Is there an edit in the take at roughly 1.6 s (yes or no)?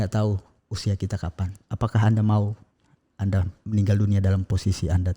yes